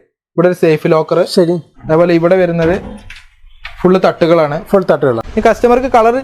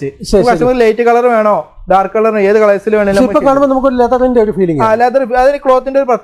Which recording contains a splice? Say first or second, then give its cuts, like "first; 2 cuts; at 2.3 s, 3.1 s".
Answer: first; 1 cut; at 5.2 s